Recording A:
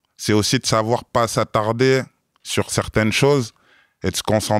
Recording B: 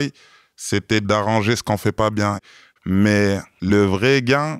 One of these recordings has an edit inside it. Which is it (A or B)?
B